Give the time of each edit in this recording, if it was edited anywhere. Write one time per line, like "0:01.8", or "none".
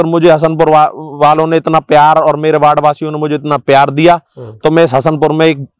none

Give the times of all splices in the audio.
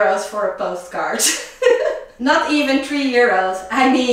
0:02.1

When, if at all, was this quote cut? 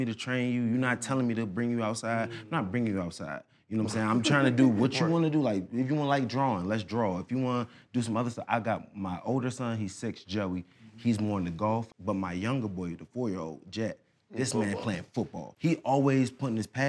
0:11.9
0:15.5

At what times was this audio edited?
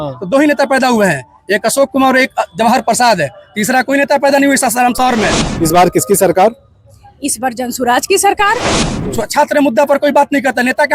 0:05.5
0:08.8

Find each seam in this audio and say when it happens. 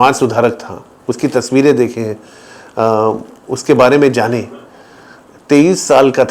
none

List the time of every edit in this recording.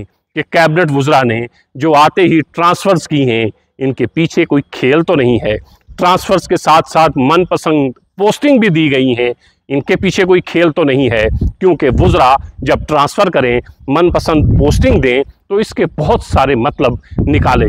none

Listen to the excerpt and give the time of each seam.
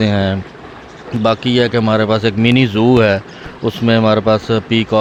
none

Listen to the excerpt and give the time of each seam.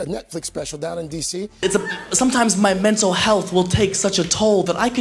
0:01.5

